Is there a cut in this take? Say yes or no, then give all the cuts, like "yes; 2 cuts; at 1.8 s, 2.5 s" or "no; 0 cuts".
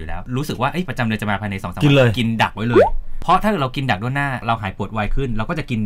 no; 0 cuts